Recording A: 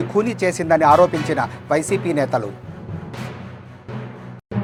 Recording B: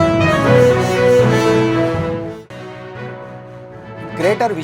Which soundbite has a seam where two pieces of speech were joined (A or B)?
B